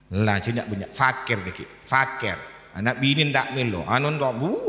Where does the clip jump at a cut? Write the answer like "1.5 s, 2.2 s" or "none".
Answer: none